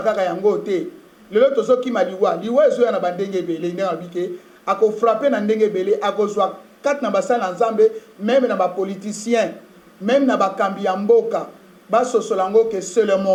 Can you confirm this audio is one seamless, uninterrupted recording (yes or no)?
yes